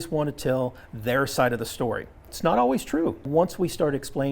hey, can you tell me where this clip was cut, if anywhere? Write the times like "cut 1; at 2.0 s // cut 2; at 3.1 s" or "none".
cut 1; at 2.3 s // cut 2; at 3.3 s